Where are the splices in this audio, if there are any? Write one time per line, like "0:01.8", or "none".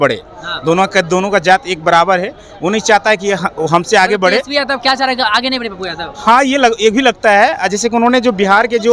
none